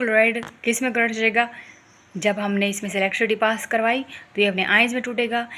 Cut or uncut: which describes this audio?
uncut